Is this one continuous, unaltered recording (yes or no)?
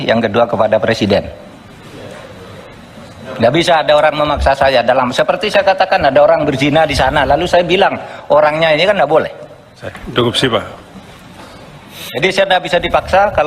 yes